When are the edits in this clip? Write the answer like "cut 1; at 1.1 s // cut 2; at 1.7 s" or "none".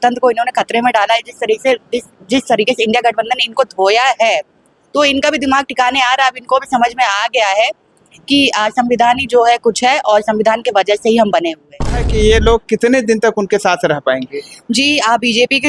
cut 1; at 12.1 s